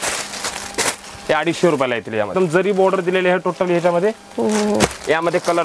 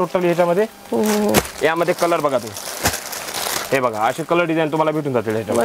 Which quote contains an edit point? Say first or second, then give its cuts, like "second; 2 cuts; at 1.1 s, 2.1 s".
first; 1 cut; at 2.3 s